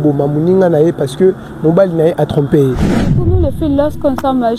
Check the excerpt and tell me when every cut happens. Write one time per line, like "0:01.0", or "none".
0:03.4